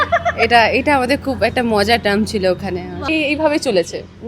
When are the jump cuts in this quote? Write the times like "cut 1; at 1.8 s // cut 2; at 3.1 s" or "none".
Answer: cut 1; at 3.3 s